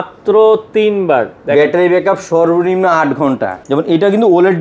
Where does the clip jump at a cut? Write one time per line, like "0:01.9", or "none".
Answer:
0:03.6